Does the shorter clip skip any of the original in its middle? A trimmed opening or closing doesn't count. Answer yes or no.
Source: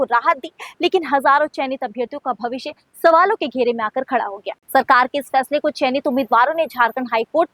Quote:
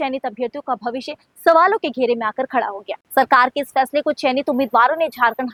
no